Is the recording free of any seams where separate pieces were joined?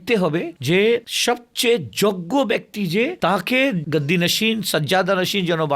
yes; 0 cuts

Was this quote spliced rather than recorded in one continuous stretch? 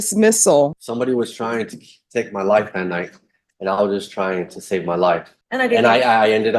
yes; 2 cuts; at 0.7 s, 5.4 s

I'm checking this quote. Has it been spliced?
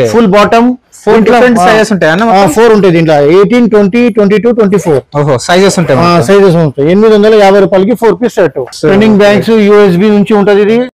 yes; 1 cut; at 8.7 s

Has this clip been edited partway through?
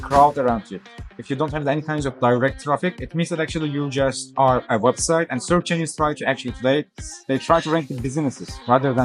no; 0 cuts

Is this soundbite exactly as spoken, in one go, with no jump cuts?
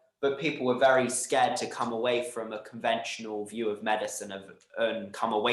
yes; 0 cuts

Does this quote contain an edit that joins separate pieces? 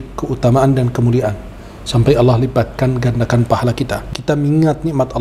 yes; 1 cut; at 4.0 s

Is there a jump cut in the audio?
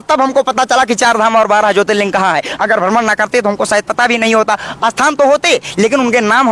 no; 0 cuts

